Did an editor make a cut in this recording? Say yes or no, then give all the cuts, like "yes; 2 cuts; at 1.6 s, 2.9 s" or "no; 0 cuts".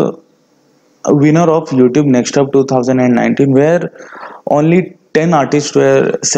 no; 0 cuts